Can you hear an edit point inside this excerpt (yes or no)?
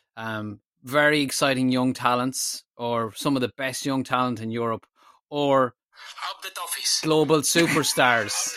no